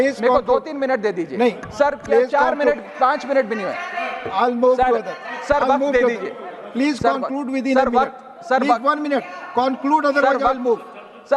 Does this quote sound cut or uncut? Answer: uncut